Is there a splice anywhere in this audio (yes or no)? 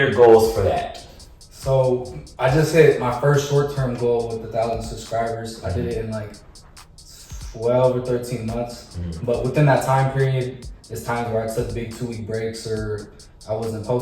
no